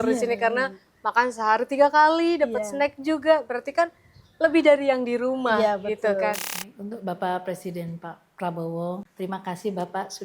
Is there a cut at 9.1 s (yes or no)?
yes